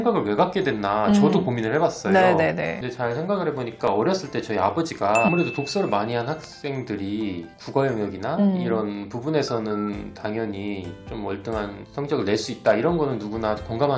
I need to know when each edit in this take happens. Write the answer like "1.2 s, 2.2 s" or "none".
2.8 s, 5.3 s, 11.8 s